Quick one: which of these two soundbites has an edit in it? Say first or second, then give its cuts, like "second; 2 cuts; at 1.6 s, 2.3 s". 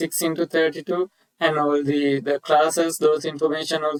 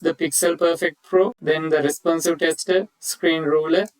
second; 1 cut; at 1.4 s